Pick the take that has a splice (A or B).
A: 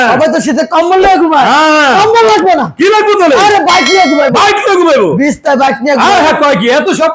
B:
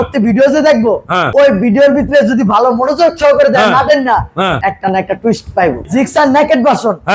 B